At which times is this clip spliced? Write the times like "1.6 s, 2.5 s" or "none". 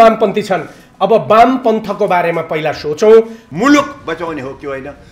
3.4 s

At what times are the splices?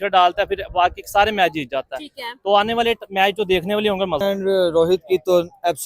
4.2 s

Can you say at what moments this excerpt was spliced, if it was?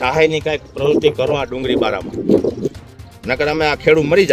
none

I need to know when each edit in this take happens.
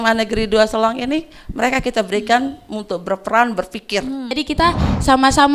4.4 s

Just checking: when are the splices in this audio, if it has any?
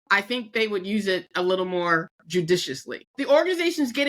2.2 s, 3.0 s

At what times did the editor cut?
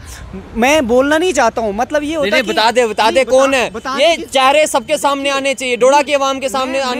none

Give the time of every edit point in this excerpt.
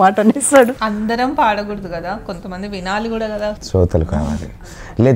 0.8 s, 3.6 s

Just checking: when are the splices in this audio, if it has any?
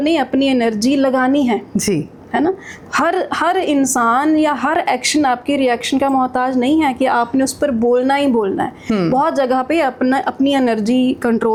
none

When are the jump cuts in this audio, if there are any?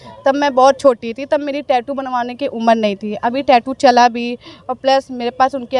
none

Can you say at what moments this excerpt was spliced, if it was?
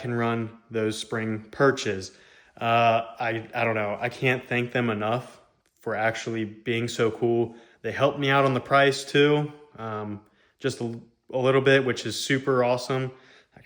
none

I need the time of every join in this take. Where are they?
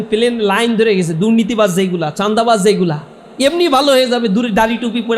none

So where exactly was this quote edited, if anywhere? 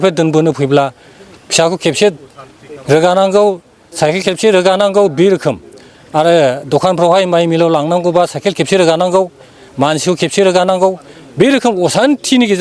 none

